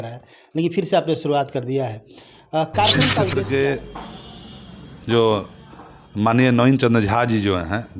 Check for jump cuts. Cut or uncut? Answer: cut